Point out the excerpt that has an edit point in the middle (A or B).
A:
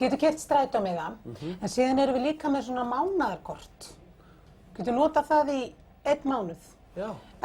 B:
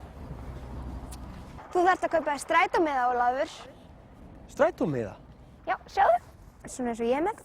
B